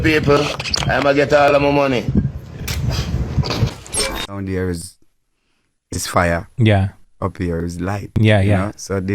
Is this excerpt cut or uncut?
cut